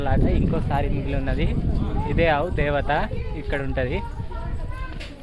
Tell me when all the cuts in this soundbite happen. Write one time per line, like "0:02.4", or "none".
none